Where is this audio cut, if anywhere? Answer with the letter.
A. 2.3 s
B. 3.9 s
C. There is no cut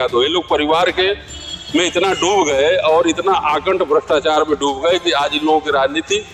C